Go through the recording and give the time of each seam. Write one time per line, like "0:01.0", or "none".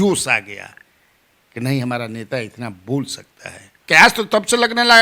0:03.8